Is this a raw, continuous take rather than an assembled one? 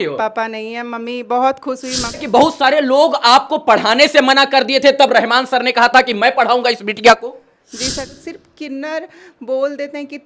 no; 2 cuts; at 2.2 s, 8.1 s

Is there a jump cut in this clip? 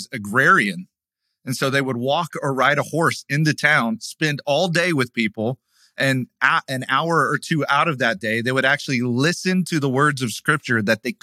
no; 0 cuts

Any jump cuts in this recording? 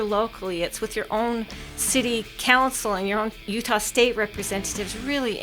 yes; 1 cut; at 3.4 s

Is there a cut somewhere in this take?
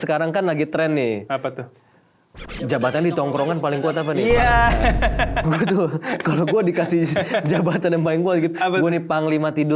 no; 0 cuts

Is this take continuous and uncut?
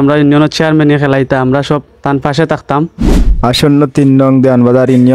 no; 1 cut; at 2.9 s

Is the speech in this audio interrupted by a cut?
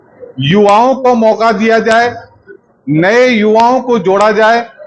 no; 0 cuts

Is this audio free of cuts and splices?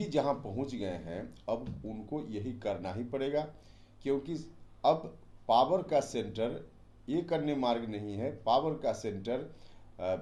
yes; 0 cuts

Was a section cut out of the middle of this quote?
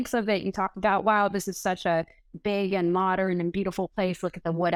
no; 0 cuts

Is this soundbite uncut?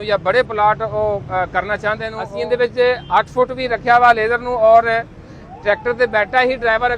no; 1 cut; at 2.2 s

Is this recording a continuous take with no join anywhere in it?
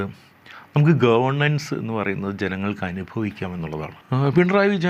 no; 1 cut; at 4.0 s

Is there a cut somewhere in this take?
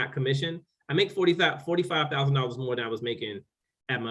no; 0 cuts

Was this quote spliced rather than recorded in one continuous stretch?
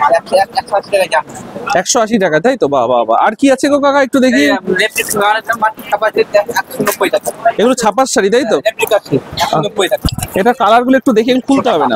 no; 0 cuts

